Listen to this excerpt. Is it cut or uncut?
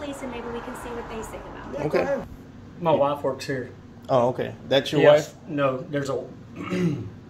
cut